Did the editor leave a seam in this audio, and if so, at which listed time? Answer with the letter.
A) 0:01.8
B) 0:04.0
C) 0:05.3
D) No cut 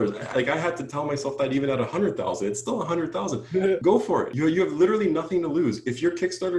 B